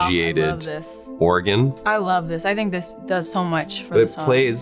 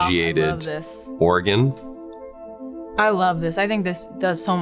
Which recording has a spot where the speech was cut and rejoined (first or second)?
first